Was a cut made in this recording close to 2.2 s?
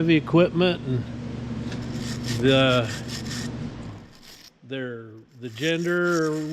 no; 0 cuts

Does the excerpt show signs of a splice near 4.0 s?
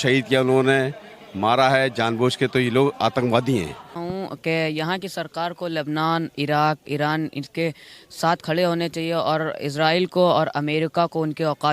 yes; 1 cut; at 4.0 s

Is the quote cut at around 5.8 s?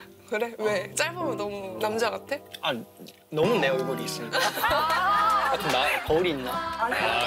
no; 1 cut; at 1.7 s

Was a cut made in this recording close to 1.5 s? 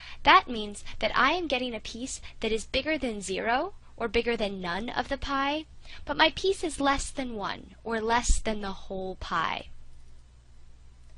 yes; 1 cut; at 1.5 s

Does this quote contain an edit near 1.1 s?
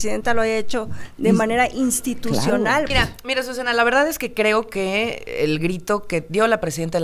no; 1 cut; at 2.9 s

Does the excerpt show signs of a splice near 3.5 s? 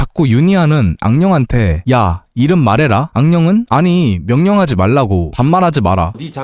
no; 1 cut; at 5.3 s

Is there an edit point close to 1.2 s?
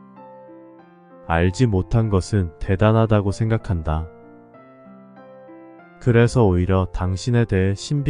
yes; 1 cut; at 1.2 s

